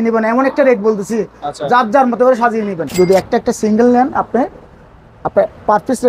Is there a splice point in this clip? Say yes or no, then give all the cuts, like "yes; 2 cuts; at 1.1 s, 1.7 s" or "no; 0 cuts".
yes; 1 cut; at 2.9 s